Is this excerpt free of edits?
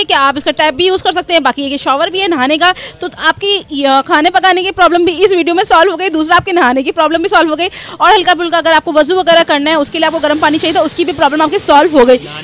yes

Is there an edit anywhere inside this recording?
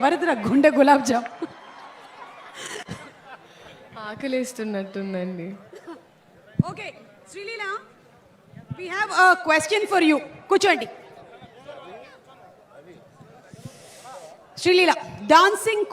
no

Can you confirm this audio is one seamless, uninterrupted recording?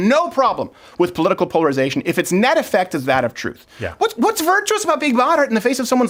yes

